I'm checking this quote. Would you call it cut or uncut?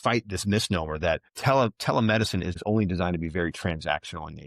cut